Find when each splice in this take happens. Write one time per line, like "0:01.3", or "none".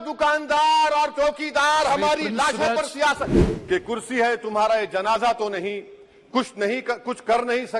0:03.3